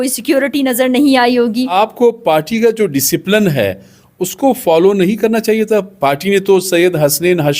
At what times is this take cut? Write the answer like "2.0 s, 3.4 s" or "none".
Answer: 1.7 s